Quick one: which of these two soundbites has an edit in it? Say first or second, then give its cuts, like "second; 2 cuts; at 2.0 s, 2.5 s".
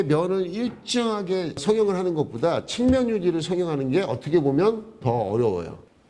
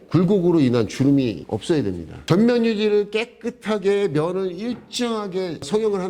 second; 1 cut; at 2.1 s